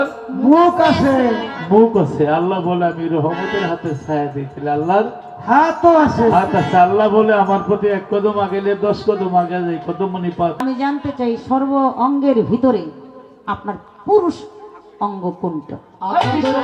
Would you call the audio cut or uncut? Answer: cut